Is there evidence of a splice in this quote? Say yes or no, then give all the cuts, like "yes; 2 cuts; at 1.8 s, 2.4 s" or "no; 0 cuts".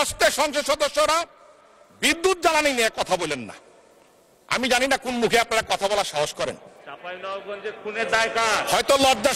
no; 0 cuts